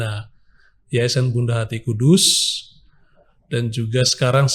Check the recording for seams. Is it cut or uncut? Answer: uncut